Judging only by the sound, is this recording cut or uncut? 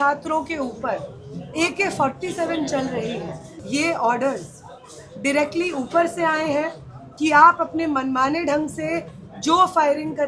cut